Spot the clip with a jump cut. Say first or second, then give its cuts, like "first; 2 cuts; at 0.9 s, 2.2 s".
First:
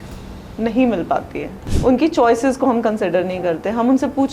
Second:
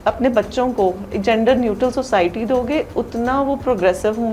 first; 1 cut; at 1.6 s